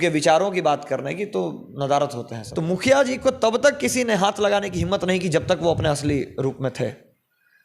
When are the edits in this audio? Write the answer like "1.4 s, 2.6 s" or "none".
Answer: 2.4 s